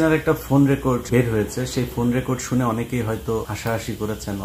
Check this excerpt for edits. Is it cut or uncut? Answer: cut